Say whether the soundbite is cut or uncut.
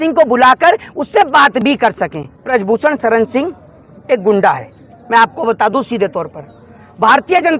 cut